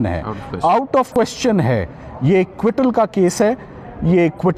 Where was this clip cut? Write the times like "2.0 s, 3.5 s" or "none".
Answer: 1.1 s